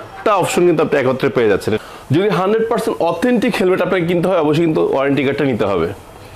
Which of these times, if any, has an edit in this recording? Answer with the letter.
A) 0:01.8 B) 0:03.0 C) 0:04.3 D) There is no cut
A